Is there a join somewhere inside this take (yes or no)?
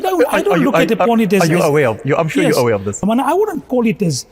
yes